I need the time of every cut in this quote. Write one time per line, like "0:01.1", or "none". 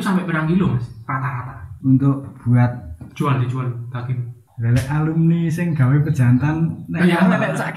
none